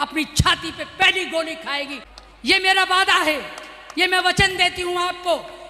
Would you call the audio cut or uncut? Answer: cut